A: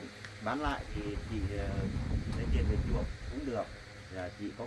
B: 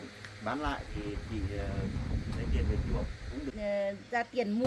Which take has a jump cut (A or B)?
B